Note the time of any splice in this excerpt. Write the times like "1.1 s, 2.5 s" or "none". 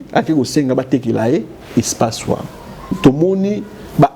3.0 s